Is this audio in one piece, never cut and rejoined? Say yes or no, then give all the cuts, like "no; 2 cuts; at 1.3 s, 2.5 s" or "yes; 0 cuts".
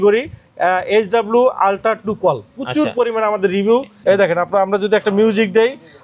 no; 1 cut; at 3.9 s